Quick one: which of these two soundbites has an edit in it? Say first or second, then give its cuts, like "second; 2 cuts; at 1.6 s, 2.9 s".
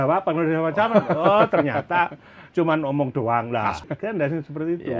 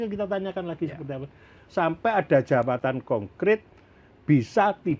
first; 1 cut; at 3.8 s